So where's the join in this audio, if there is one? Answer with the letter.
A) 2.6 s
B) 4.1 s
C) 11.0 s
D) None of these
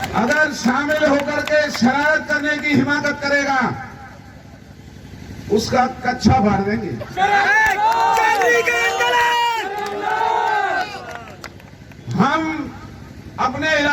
D